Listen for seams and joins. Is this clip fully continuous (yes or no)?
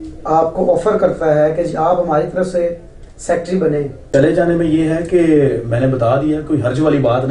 no